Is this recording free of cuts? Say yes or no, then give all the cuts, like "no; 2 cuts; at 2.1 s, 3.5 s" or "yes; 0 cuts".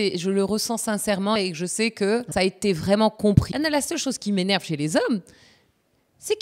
no; 3 cuts; at 1.4 s, 2.3 s, 3.5 s